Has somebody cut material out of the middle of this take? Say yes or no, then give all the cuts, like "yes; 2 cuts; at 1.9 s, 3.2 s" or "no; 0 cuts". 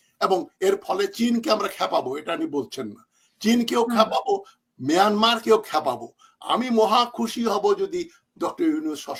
no; 0 cuts